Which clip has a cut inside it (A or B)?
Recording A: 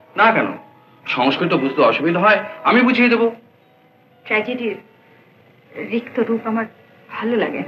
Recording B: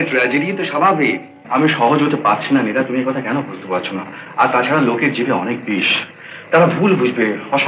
B